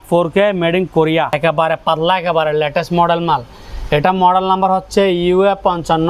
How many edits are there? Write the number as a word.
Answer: one